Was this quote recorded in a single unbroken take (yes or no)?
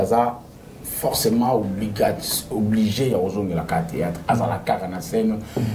yes